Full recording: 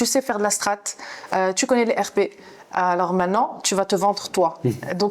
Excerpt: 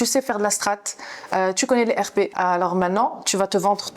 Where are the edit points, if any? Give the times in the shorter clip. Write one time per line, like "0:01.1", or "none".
0:02.3